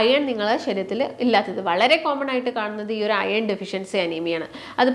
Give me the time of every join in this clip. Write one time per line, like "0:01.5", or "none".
none